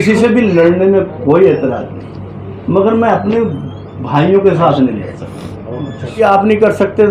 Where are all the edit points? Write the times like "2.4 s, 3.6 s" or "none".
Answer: 6.2 s